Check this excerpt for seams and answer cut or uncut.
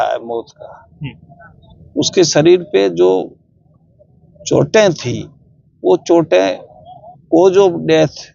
uncut